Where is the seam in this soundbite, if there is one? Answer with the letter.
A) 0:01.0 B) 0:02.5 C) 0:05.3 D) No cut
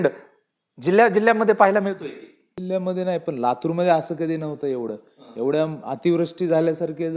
B